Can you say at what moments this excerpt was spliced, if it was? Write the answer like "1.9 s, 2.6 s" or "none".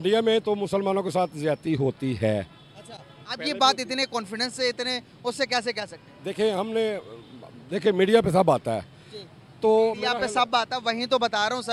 none